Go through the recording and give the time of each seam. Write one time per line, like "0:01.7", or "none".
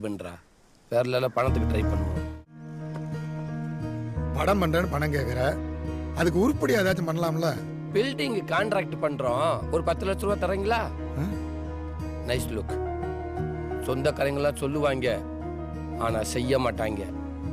0:02.3